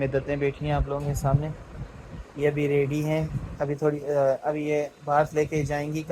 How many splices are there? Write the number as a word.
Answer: zero